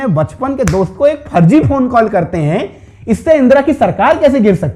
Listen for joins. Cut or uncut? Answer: uncut